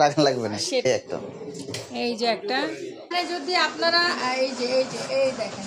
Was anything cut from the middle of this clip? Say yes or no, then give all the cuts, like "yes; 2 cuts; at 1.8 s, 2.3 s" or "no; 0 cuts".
yes; 2 cuts; at 0.8 s, 3.1 s